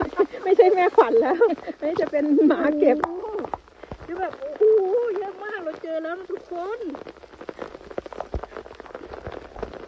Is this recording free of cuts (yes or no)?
no